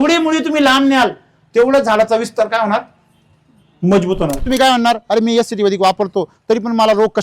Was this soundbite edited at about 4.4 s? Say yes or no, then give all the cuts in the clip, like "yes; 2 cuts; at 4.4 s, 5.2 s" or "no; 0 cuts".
yes; 1 cut; at 4.4 s